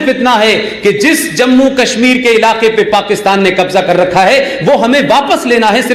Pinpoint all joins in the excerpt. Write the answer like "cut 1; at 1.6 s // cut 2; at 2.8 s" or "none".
none